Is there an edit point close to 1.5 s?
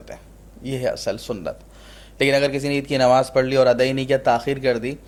no; 0 cuts

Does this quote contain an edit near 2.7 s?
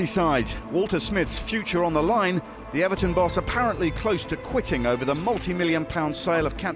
no; 0 cuts

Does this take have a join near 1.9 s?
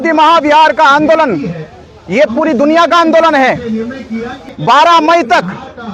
no; 1 cut; at 4.5 s

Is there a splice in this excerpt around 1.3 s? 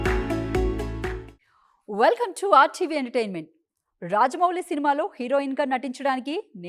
yes; 1 cut; at 1.3 s

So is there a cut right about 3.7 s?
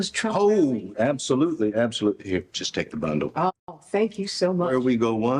yes; 1 cut; at 3.7 s

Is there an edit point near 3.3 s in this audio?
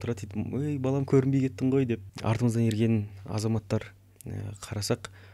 no; 1 cut; at 2.1 s

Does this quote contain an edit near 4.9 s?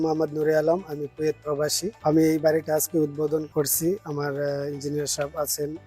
no; 2 cuts; at 1.9 s, 3.5 s

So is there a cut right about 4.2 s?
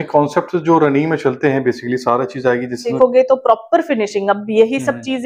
no; 1 cut; at 2.9 s

